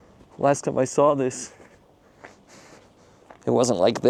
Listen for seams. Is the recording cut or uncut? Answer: uncut